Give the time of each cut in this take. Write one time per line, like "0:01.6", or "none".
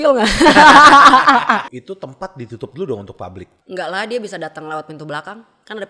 0:01.8
0:03.5